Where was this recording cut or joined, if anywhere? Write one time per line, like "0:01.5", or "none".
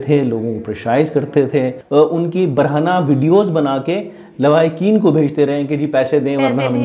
0:01.8